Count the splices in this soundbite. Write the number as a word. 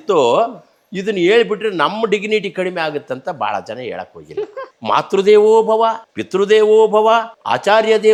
zero